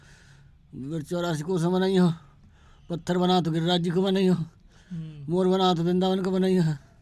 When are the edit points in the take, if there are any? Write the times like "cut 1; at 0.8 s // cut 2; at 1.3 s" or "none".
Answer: none